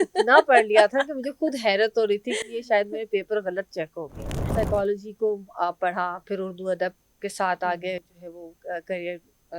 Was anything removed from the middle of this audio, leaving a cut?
yes; 1 cut; at 4.4 s

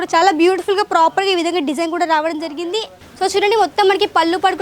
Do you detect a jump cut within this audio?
yes; 1 cut; at 3.0 s

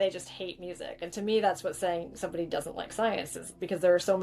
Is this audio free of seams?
no; 1 cut; at 1.0 s

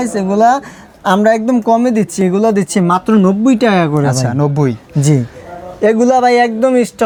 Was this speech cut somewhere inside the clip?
no; 0 cuts

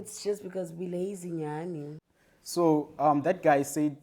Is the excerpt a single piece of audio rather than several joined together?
no; 1 cut; at 2.0 s

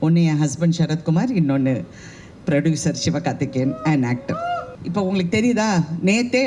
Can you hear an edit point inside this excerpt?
yes; 1 cut; at 4.7 s

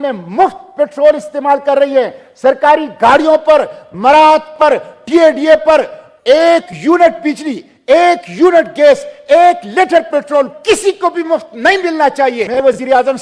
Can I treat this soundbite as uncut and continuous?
yes; 0 cuts

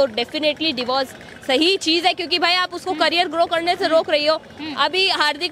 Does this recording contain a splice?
no; 0 cuts

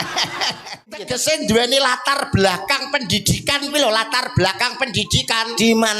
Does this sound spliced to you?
yes; 1 cut; at 1.2 s

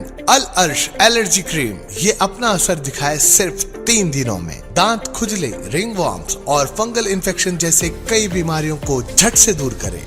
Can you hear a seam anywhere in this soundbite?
no; 0 cuts

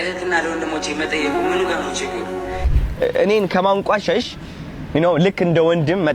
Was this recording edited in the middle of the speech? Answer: yes; 1 cut; at 2.7 s

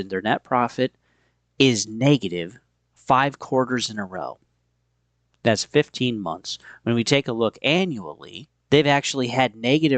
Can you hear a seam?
no; 0 cuts

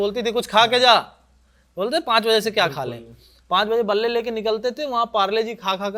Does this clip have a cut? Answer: no; 0 cuts

